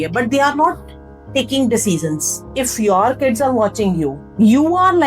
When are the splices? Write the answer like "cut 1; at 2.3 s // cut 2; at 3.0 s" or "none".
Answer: cut 1; at 2.6 s // cut 2; at 4.2 s